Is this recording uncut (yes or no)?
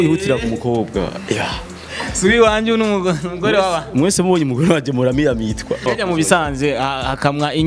no